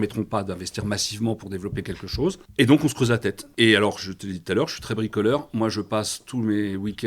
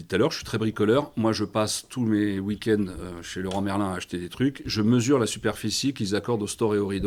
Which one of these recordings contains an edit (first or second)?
first